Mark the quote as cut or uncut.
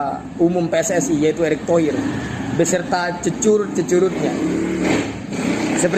uncut